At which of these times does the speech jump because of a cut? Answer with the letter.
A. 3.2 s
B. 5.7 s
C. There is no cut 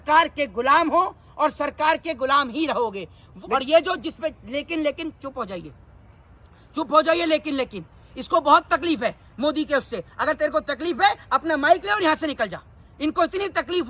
A